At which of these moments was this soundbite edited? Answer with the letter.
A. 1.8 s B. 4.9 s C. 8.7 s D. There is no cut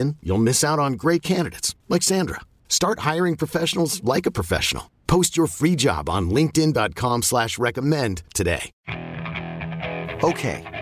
C